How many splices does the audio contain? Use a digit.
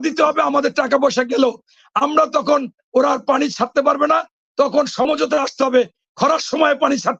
0